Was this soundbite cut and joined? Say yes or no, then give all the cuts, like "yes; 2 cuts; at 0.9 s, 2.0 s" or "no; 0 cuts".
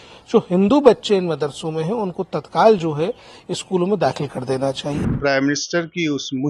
yes; 1 cut; at 5.1 s